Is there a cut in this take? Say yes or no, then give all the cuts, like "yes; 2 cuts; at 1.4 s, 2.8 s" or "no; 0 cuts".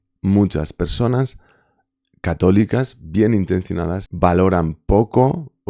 yes; 1 cut; at 4.0 s